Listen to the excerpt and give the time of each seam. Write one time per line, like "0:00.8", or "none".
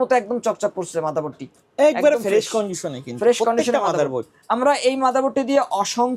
none